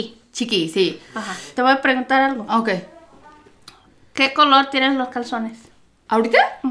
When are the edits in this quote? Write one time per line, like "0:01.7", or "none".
0:01.5

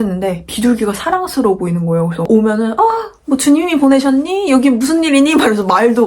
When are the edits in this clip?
0:02.3

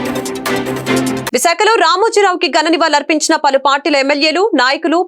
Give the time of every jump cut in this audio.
0:01.2

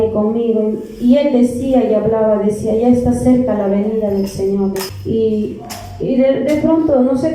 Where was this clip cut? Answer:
0:04.9

